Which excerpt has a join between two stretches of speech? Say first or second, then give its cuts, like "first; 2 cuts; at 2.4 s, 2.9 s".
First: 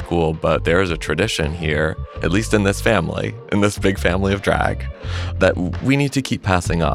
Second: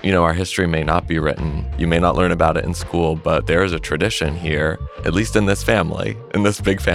second; 1 cut; at 1.5 s